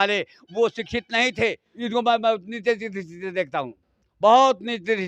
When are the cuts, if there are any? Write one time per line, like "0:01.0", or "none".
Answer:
0:01.7